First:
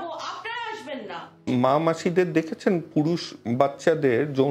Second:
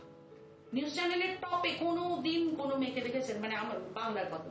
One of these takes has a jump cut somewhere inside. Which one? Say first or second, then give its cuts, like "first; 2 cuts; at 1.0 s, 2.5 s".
first; 1 cut; at 1.4 s